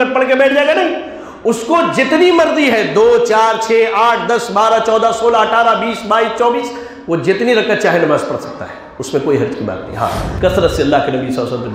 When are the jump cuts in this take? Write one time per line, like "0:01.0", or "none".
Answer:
0:10.3